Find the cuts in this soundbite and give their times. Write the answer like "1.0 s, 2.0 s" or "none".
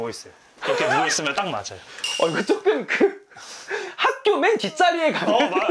none